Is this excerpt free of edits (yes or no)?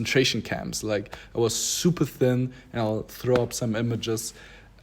yes